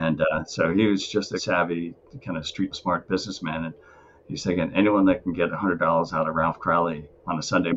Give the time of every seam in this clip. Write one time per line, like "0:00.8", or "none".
0:01.4
0:02.8